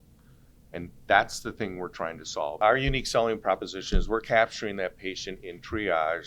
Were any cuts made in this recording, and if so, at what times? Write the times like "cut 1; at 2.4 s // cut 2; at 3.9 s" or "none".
cut 1; at 2.6 s